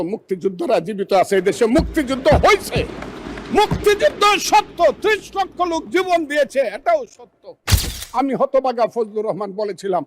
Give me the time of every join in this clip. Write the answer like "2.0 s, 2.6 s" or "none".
8.0 s